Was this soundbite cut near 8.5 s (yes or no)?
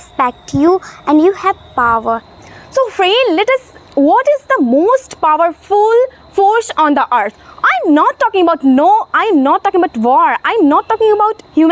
no